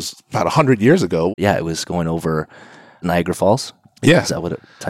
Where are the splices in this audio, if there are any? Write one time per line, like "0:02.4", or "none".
0:01.3